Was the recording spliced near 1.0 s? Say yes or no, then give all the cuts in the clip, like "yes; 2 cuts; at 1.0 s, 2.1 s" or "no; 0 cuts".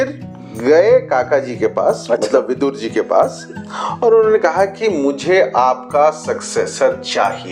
no; 0 cuts